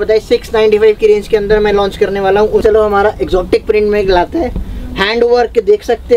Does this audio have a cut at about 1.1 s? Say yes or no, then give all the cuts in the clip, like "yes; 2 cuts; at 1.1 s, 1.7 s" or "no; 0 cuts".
no; 1 cut; at 2.6 s